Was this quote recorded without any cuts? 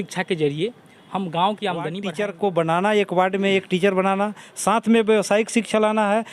no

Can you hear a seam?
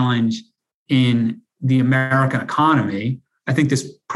no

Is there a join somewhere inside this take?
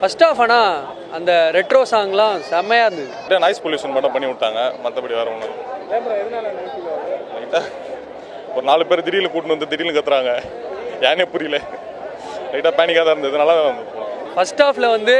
yes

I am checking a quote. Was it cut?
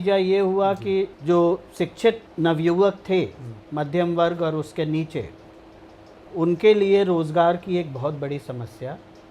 yes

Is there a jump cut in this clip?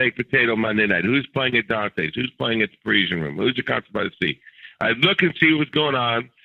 no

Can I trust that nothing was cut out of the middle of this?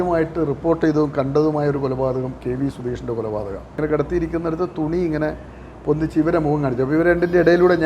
no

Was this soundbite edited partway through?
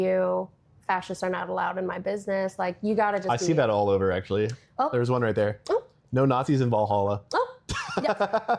no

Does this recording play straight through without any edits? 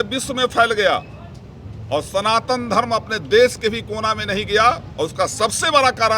yes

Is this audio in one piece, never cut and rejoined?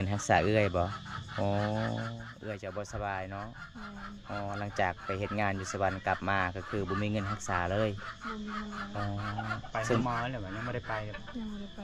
yes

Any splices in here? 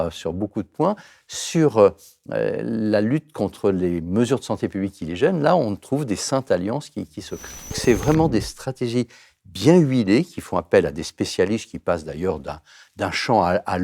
yes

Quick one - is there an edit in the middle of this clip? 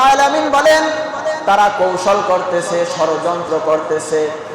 yes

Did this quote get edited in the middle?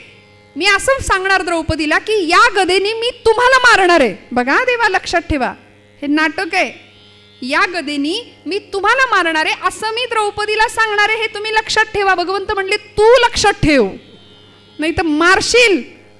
no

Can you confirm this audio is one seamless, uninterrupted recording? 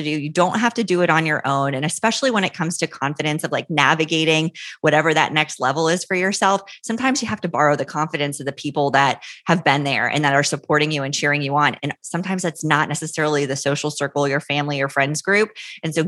yes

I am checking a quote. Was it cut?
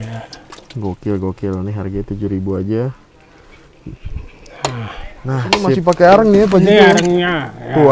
yes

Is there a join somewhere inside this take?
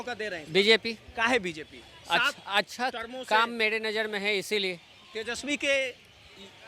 no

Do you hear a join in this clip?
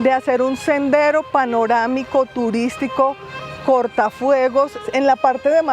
yes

